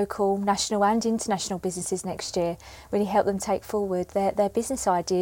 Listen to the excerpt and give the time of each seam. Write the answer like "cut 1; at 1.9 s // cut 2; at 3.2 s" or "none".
none